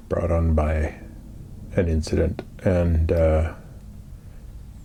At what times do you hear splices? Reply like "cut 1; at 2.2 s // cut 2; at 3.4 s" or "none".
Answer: none